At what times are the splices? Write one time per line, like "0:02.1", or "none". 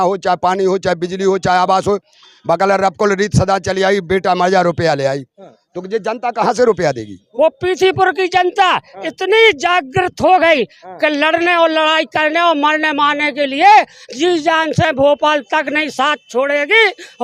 0:07.2